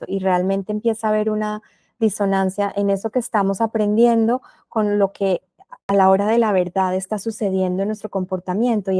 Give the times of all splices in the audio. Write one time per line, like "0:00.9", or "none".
0:05.9